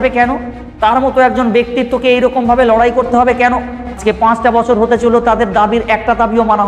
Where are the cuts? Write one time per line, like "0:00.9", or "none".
0:04.0